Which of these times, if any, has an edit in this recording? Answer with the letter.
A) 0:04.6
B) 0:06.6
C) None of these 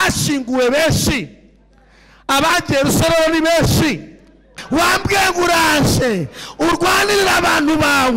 A